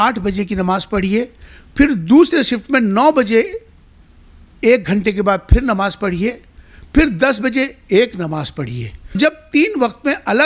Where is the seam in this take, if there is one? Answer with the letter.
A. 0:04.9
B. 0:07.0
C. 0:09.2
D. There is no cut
C